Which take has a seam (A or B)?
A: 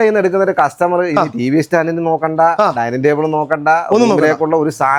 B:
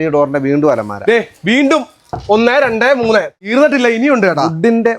B